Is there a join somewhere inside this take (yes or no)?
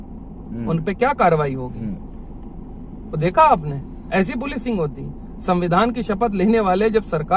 no